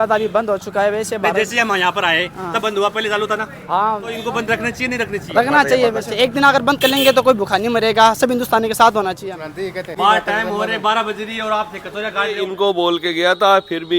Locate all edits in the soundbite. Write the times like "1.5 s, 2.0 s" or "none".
4.2 s, 6.1 s, 9.9 s, 12.4 s